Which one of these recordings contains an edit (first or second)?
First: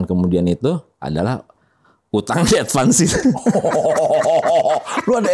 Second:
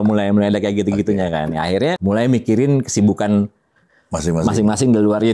second